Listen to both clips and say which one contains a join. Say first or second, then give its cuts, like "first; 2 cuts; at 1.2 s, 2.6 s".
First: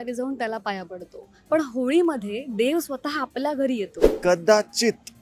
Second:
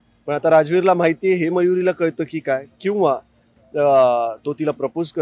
first; 1 cut; at 4.2 s